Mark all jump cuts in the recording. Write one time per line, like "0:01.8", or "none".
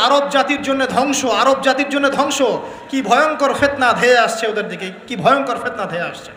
none